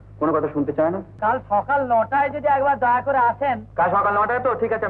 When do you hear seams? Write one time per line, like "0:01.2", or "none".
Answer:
0:01.1